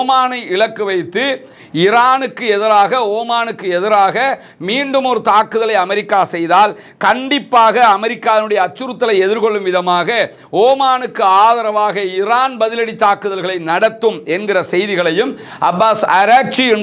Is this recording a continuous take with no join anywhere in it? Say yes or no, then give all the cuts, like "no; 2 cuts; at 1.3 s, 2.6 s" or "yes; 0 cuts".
yes; 0 cuts